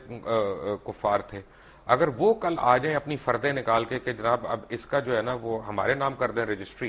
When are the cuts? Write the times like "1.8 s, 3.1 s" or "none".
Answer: none